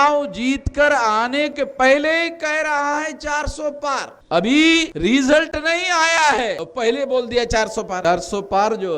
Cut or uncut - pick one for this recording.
cut